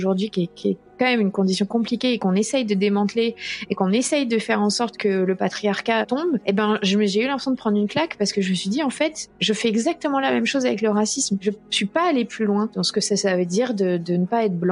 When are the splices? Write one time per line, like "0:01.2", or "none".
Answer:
0:06.0
0:11.4
0:12.8